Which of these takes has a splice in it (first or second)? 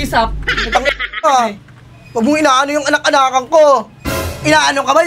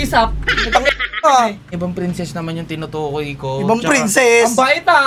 second